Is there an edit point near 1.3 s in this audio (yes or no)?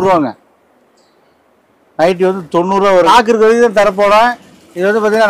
no